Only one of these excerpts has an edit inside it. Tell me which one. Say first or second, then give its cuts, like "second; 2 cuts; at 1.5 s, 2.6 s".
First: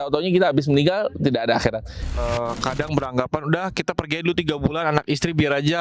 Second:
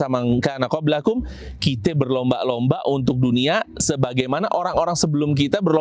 first; 1 cut; at 2.1 s